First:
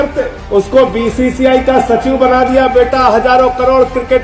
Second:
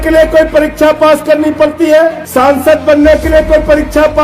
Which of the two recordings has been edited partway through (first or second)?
second